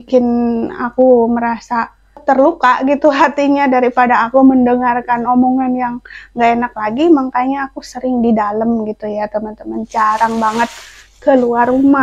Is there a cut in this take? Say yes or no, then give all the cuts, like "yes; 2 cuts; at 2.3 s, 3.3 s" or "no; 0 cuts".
yes; 1 cut; at 2.1 s